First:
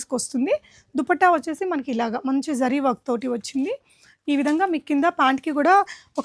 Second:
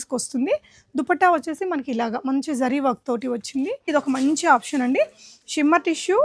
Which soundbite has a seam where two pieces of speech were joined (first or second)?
second